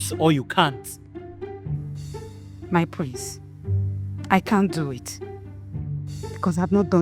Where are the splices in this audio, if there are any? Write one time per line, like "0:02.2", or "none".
none